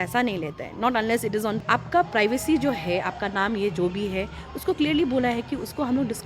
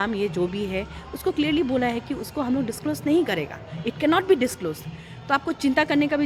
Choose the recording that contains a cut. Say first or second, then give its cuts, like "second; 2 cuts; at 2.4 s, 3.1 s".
first; 1 cut; at 1.6 s